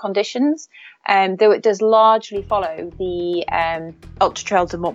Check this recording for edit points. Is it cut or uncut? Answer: cut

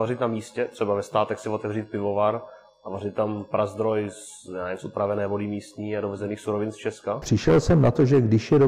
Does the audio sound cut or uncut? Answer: cut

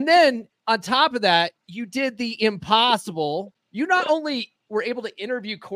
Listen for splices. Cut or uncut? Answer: cut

